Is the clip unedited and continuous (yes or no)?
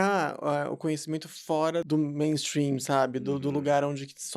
no